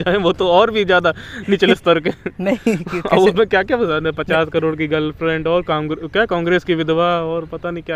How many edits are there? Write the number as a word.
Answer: one